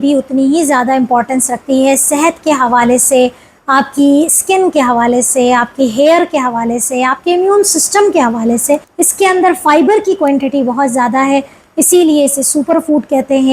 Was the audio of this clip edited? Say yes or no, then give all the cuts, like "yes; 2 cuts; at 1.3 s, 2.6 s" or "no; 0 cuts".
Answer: yes; 1 cut; at 8.9 s